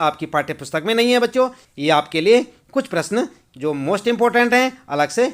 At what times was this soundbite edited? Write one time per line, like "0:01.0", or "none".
0:01.6

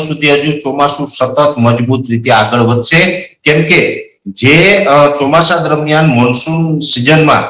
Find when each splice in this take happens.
none

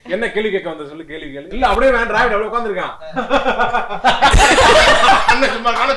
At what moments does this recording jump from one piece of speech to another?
0:01.5

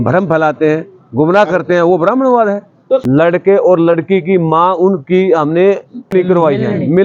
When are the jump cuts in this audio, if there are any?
0:03.3
0:06.1

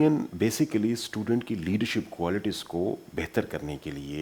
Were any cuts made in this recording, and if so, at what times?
none

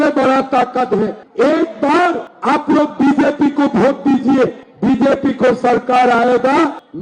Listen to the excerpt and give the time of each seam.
0:01.2

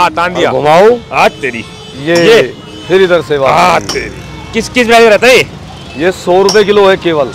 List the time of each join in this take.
none

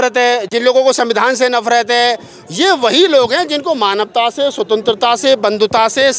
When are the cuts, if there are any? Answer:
none

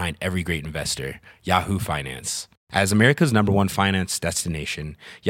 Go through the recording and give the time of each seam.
none

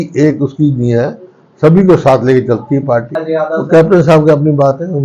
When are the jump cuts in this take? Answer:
0:03.1

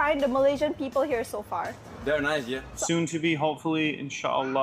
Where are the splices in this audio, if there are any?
0:02.7

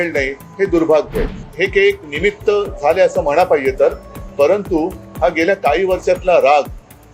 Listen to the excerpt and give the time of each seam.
0:01.5

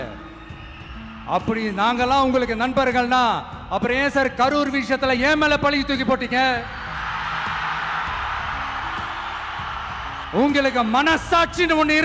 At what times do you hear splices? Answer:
0:10.2

